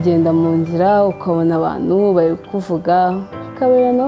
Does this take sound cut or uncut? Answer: uncut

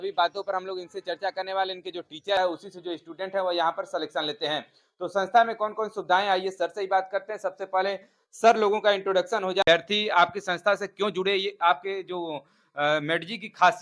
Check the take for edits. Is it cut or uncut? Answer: cut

